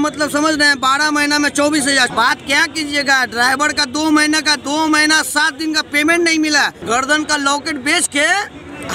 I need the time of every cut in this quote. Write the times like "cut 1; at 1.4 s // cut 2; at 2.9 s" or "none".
cut 1; at 2.1 s // cut 2; at 6.8 s